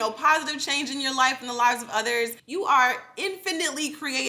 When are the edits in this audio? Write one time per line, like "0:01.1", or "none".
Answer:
0:02.4